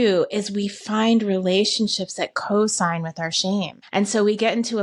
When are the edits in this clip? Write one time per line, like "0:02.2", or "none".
0:03.8